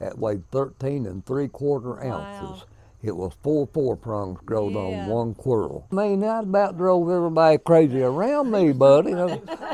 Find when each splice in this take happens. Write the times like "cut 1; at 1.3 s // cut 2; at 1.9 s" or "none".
cut 1; at 5.9 s